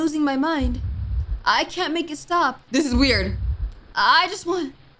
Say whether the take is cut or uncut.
cut